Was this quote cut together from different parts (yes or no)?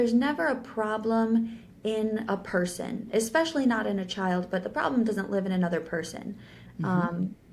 no